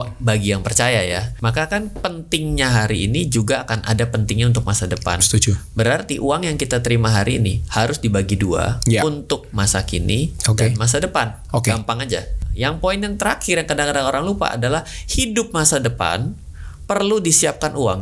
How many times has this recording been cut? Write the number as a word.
two